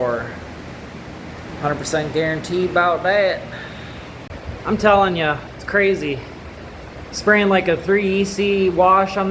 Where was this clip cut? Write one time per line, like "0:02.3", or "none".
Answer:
0:04.2